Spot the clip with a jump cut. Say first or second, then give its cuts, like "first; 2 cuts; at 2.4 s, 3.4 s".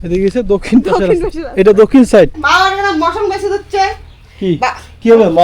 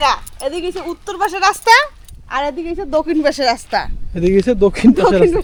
first; 1 cut; at 2.4 s